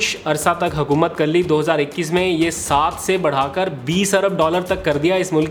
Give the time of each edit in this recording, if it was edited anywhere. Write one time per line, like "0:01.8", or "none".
none